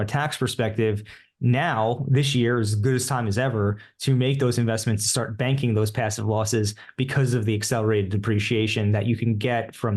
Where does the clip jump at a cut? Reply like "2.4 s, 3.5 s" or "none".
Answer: none